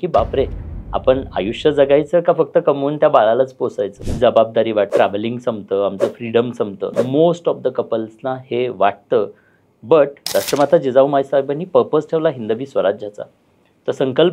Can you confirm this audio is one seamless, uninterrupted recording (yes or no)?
no